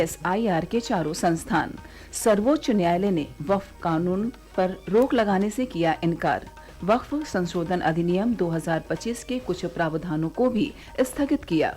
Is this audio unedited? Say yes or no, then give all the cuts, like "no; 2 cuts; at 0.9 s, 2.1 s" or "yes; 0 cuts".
no; 1 cut; at 4.4 s